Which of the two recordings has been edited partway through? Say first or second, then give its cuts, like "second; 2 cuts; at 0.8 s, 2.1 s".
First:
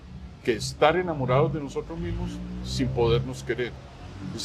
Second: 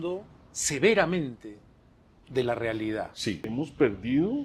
second; 1 cut; at 3.5 s